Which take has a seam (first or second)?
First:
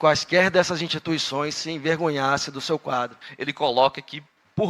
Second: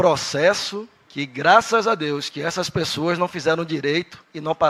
first